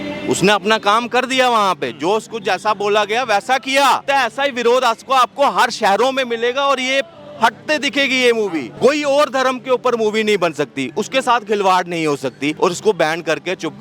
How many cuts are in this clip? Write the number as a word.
three